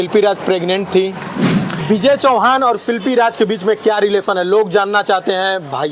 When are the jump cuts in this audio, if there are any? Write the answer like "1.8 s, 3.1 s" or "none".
1.7 s